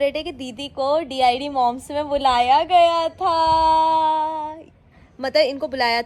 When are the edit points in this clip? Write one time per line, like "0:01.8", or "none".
none

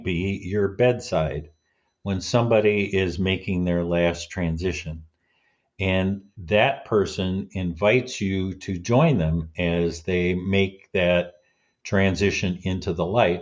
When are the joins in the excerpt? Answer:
none

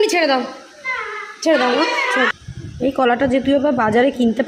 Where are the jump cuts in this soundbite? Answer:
0:02.4

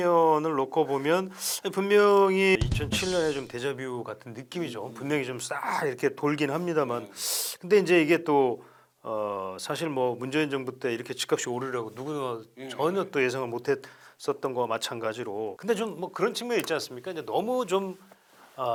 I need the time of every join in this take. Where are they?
none

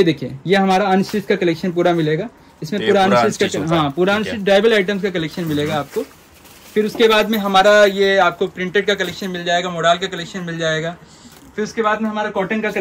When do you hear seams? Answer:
none

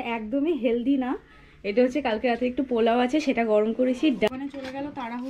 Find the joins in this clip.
0:04.3

